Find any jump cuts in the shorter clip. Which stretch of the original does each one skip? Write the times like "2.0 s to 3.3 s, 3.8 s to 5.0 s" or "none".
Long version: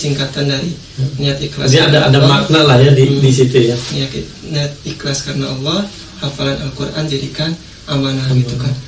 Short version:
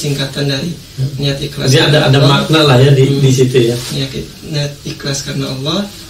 none